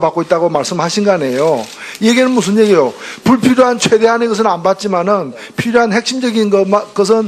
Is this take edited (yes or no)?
yes